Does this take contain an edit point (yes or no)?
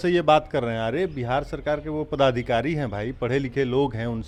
no